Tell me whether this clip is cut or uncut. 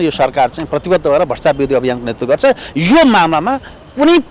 uncut